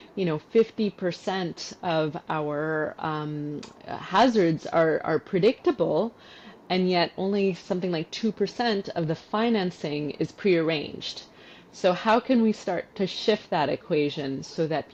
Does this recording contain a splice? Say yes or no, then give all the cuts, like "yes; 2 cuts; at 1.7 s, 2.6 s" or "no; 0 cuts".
no; 0 cuts